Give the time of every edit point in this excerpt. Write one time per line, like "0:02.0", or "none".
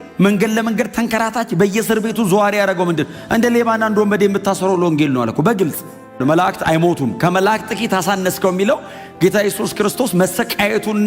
0:06.2